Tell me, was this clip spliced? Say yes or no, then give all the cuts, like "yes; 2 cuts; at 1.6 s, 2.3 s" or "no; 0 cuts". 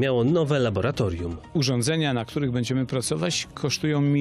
no; 0 cuts